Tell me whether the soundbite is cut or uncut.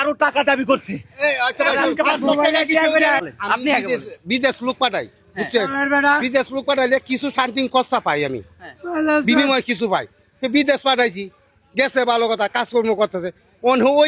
cut